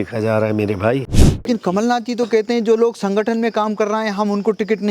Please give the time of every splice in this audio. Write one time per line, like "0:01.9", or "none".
0:01.5

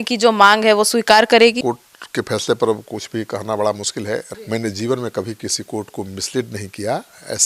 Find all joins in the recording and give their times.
0:01.6
0:04.3

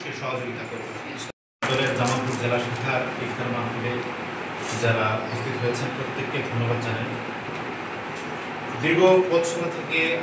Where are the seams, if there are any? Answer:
0:01.3

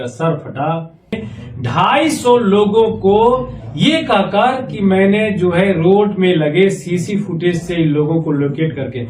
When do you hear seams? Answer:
0:01.3

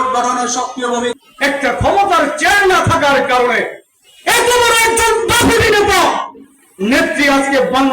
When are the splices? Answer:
0:01.1

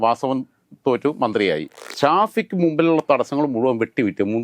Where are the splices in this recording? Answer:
0:01.9

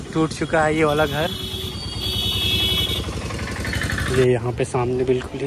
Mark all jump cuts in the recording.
0:04.1

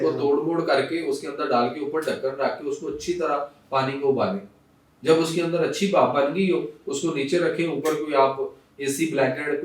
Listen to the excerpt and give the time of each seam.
none

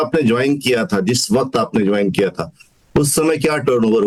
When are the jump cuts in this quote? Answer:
none

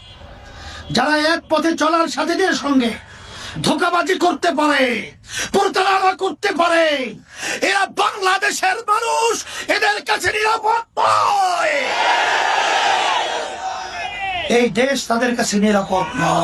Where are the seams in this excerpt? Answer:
none

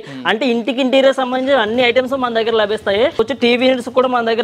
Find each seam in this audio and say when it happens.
0:03.2

